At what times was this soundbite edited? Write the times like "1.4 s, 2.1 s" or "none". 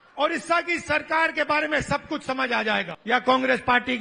2.9 s